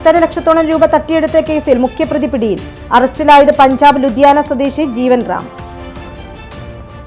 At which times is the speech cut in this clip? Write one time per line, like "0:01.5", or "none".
none